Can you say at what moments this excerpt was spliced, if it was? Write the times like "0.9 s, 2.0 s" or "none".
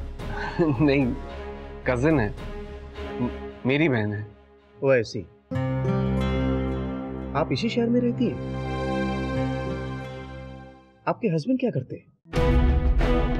none